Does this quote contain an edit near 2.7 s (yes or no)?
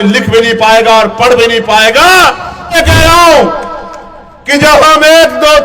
yes